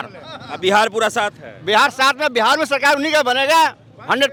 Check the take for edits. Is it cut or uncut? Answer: uncut